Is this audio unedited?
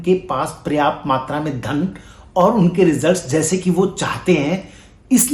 yes; 0 cuts

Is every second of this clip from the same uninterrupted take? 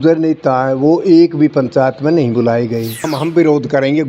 no; 1 cut; at 3.1 s

